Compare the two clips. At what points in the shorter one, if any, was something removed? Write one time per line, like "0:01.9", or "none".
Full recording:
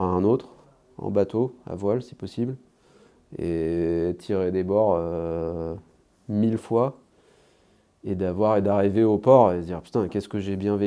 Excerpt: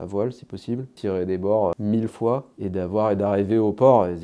0:00.9
0:01.8
0:02.5